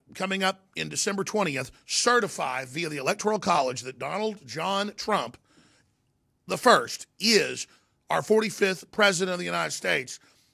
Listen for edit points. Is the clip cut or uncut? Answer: cut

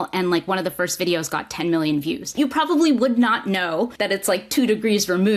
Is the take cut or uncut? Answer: cut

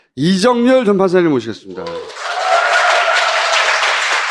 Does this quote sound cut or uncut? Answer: uncut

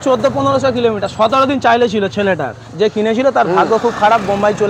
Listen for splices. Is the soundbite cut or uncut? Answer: uncut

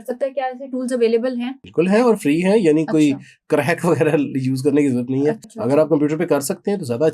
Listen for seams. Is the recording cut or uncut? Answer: cut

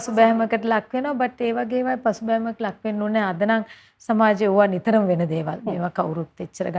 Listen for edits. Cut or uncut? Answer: uncut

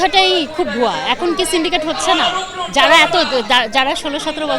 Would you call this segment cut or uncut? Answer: uncut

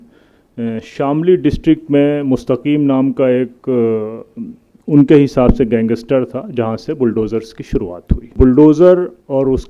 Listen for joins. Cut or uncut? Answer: cut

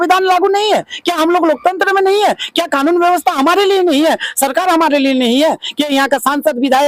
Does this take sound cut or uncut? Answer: uncut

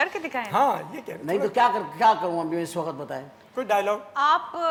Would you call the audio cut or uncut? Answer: uncut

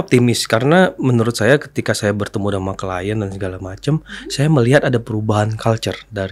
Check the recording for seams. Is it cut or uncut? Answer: uncut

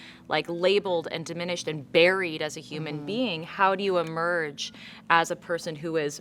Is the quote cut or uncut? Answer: uncut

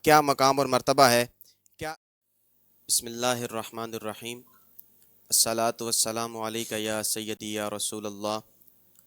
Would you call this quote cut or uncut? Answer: cut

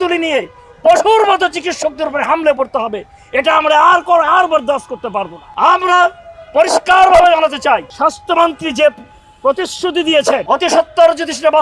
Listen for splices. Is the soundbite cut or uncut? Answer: cut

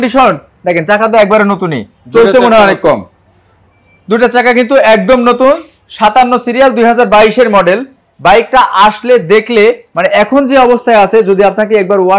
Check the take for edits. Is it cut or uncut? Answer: uncut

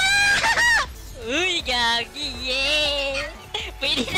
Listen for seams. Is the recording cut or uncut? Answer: uncut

